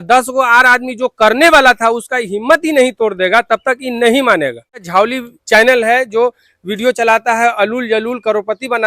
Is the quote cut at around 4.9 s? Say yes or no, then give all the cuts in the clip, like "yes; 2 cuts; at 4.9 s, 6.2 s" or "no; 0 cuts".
yes; 1 cut; at 4.9 s